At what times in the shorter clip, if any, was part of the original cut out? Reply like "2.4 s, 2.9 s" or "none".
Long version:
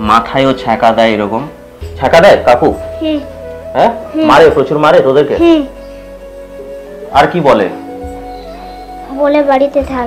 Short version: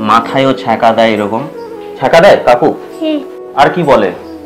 3.4 s